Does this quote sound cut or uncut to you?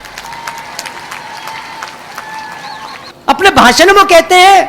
cut